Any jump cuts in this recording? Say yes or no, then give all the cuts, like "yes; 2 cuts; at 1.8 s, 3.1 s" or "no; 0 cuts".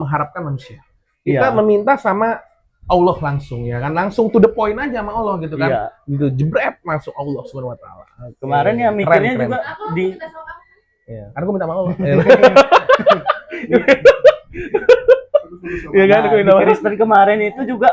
no; 0 cuts